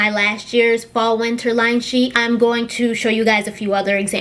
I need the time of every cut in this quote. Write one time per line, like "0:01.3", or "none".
none